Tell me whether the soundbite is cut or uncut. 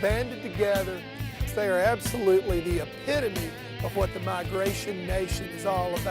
cut